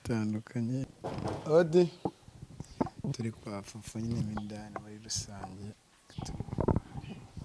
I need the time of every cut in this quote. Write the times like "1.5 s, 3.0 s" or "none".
1.0 s